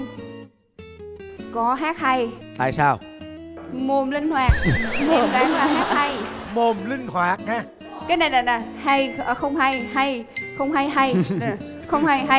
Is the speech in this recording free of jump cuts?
yes; 0 cuts

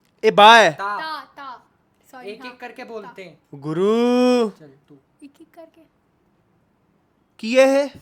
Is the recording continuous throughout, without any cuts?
yes; 0 cuts

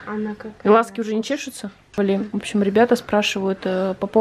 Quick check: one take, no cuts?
no; 1 cut; at 1.8 s

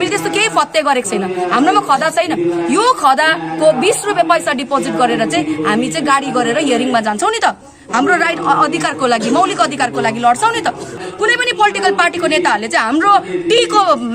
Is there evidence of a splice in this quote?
yes; 1 cut; at 11.0 s

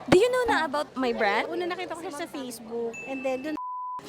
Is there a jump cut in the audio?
yes; 1 cut; at 0.9 s

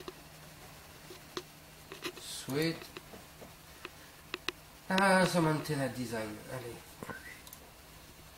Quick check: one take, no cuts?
no; 1 cut; at 2.6 s

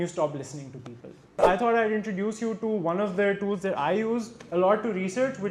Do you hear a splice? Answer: yes; 1 cut; at 1.4 s

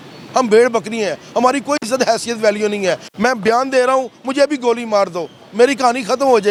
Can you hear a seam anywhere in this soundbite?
no; 0 cuts

